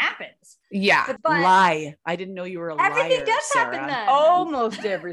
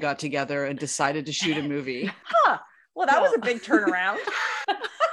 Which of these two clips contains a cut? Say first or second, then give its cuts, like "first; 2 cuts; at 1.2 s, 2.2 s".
second; 1 cut; at 2.2 s